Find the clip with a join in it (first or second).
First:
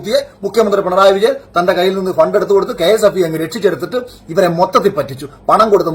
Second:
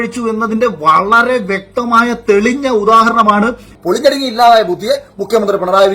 second